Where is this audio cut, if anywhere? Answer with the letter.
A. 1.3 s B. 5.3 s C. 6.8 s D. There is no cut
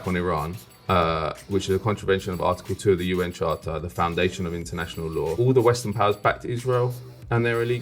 B